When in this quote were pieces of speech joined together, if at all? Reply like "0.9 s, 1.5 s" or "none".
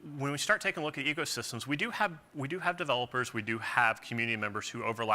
3.4 s